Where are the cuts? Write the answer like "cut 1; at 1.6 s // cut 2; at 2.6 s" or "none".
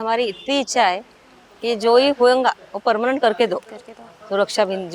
none